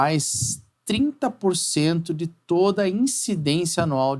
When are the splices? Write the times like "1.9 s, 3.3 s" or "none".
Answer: none